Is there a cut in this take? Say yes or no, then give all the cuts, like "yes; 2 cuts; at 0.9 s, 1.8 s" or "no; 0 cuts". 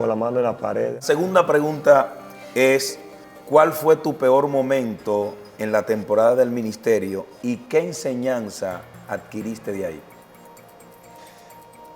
yes; 1 cut; at 1.0 s